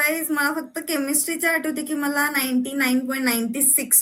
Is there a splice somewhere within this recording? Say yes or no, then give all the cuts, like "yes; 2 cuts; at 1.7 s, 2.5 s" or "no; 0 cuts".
no; 0 cuts